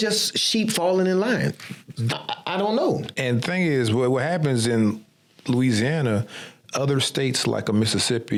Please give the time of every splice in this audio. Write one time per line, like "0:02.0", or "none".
none